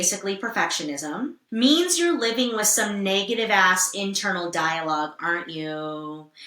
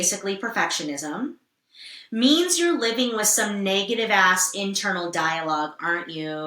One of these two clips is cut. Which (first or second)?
first